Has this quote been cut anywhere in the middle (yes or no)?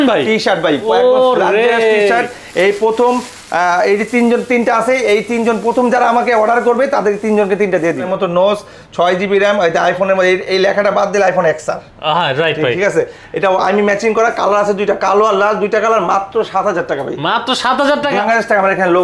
yes